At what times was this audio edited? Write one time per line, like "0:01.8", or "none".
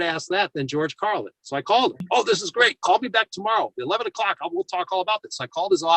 0:02.0